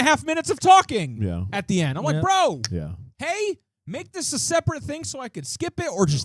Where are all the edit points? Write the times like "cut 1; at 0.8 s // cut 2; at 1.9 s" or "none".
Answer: none